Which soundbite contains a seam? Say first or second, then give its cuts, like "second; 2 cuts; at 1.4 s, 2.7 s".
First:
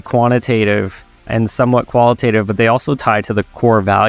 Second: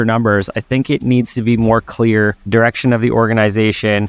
second; 1 cut; at 2.4 s